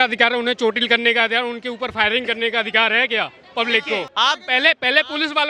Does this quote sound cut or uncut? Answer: cut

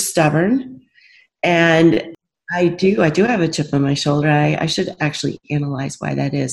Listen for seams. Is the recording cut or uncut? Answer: cut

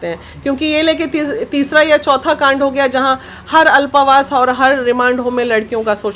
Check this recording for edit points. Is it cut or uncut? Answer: uncut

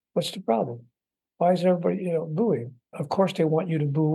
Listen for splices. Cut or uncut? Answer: cut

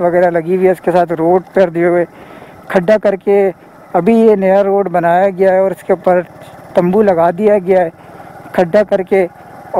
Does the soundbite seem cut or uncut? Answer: uncut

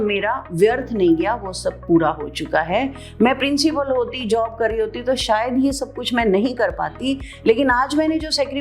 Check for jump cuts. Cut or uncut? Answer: uncut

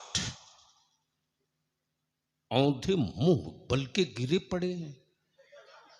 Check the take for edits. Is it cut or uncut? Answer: uncut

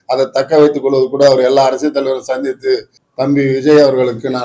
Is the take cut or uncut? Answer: cut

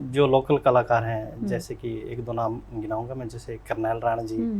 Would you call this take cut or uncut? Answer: uncut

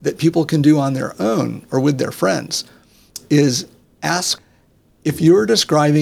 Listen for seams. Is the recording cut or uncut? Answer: cut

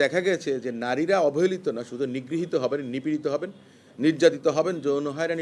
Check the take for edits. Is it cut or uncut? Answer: uncut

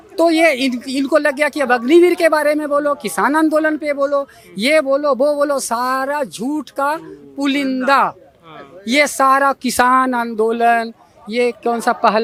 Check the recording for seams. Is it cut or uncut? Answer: uncut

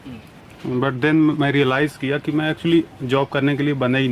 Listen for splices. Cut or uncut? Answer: uncut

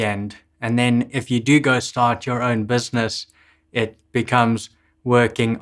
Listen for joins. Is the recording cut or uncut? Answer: uncut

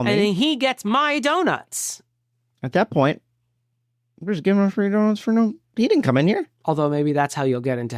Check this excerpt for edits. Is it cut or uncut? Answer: cut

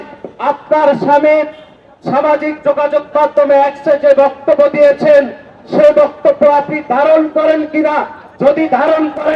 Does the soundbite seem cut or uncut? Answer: uncut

